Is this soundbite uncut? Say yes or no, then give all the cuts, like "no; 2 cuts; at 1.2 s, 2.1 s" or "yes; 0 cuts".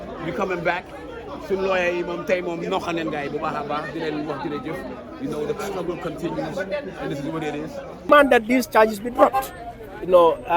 no; 1 cut; at 8.1 s